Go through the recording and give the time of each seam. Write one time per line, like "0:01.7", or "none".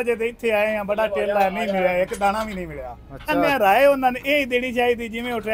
0:03.4